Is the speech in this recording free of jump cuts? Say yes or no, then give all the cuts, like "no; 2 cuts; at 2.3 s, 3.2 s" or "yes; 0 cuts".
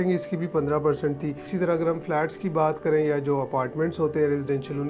no; 1 cut; at 1.4 s